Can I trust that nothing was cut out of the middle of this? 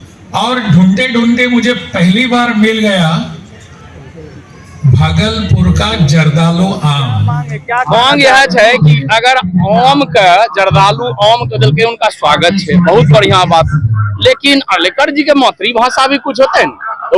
no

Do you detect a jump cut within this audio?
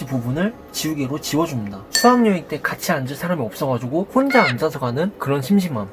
yes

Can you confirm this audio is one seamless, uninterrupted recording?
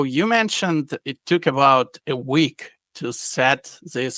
yes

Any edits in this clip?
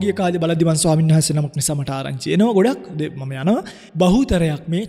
yes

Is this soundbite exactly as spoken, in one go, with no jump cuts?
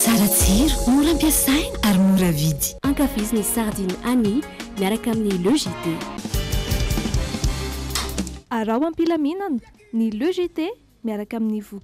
yes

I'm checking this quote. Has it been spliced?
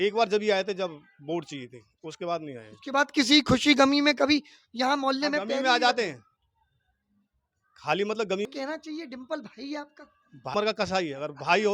yes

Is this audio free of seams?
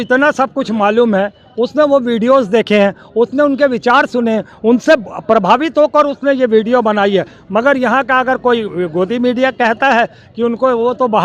yes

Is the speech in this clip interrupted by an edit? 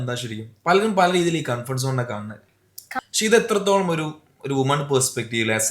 yes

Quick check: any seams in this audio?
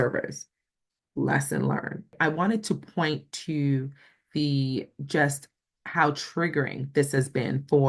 yes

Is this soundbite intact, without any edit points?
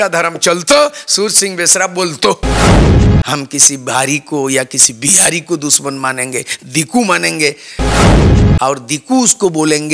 no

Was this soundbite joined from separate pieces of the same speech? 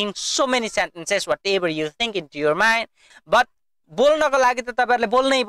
yes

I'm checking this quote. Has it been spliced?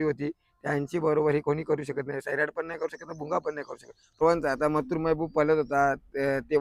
yes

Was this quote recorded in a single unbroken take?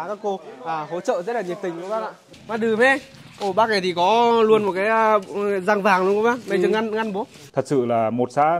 no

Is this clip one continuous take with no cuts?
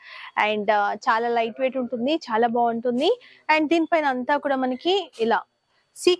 yes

